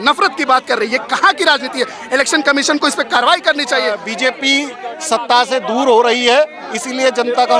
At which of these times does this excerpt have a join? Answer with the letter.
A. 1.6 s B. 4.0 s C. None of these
B